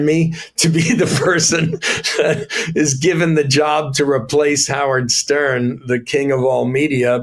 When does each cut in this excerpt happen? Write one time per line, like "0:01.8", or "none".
none